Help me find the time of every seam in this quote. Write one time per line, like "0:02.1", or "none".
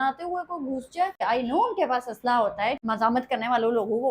0:01.2
0:02.8